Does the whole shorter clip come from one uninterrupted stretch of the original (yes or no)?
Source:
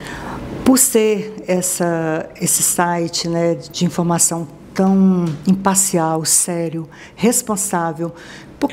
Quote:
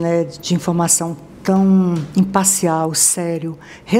yes